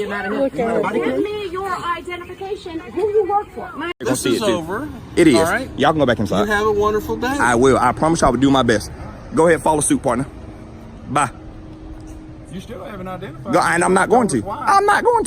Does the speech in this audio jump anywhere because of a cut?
yes; 1 cut; at 4.0 s

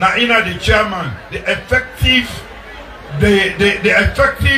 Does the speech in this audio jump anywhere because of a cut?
no; 0 cuts

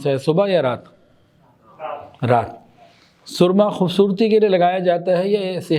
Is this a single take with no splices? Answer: yes; 0 cuts

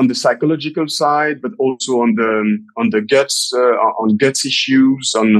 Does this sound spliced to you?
no; 0 cuts

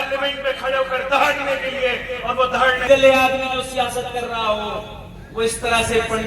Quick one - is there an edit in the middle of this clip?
yes; 1 cut; at 2.8 s

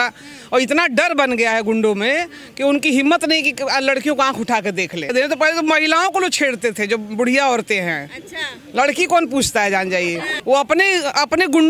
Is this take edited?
yes; 2 cuts; at 5.1 s, 10.3 s

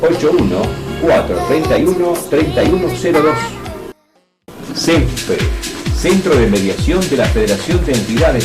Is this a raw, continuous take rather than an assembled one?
no; 1 cut; at 4.4 s

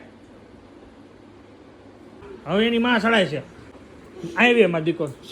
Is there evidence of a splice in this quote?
yes; 2 cuts; at 2.3 s, 3.7 s

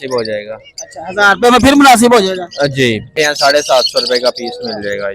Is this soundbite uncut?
no; 1 cut; at 3.1 s

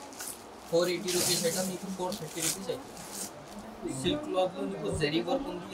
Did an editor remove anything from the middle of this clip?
yes; 1 cut; at 3.6 s

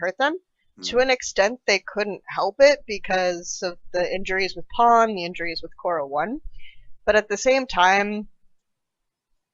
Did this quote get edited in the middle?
yes; 1 cut; at 3.0 s

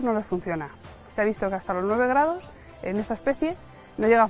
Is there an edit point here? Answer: no; 0 cuts

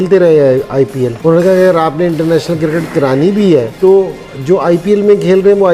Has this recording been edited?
no; 0 cuts

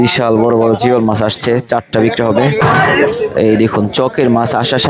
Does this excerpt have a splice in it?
yes; 1 cut; at 2.6 s

